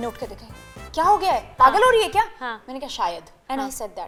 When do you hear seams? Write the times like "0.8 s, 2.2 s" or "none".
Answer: none